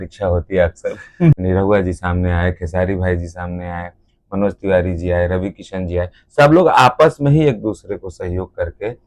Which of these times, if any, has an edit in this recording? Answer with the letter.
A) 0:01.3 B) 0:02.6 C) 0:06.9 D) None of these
A